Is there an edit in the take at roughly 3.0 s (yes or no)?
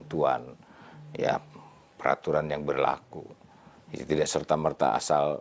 no